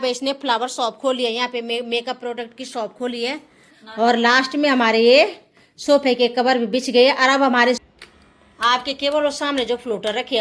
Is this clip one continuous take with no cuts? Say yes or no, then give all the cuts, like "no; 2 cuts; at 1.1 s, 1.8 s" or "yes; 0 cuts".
no; 2 cuts; at 3.6 s, 7.8 s